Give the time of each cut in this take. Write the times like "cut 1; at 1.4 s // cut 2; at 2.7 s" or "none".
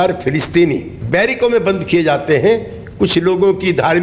cut 1; at 0.9 s